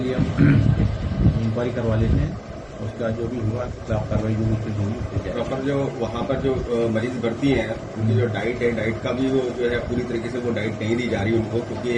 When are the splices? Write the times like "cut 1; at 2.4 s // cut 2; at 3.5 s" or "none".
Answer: none